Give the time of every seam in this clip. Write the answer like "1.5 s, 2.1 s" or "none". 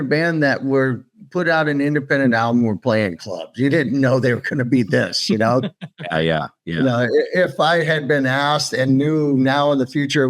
none